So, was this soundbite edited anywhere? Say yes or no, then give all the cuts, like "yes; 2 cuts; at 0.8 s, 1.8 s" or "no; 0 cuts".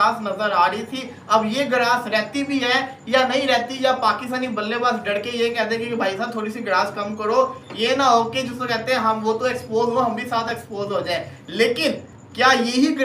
no; 0 cuts